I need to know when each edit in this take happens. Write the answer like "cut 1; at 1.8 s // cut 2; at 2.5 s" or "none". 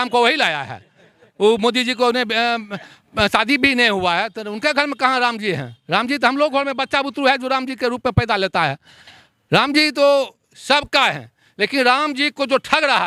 none